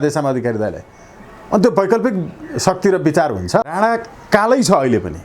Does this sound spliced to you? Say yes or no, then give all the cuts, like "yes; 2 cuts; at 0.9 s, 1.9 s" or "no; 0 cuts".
yes; 1 cut; at 3.8 s